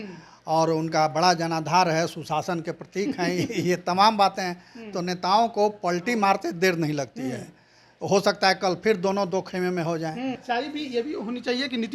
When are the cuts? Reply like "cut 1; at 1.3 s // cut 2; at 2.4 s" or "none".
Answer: cut 1; at 10.4 s